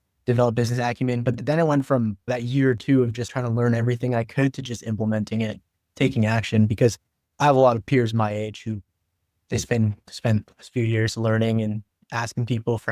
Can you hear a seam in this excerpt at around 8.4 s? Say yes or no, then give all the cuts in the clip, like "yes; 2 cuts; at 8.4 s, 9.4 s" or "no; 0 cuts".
no; 4 cuts; at 1.4 s, 2.3 s, 3.3 s, 10.1 s